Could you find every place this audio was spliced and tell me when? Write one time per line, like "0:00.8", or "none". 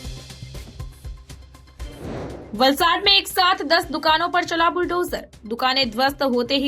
0:02.1